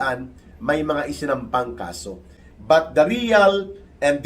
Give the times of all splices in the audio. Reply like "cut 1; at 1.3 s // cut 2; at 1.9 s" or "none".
none